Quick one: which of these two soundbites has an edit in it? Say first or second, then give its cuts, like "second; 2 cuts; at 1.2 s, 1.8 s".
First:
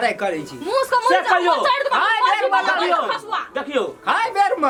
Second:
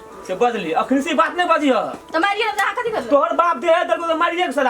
second; 1 cut; at 2.0 s